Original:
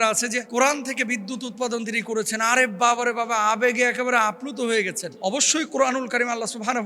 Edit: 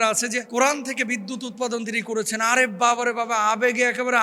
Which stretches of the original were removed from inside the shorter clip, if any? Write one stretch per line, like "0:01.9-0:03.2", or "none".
none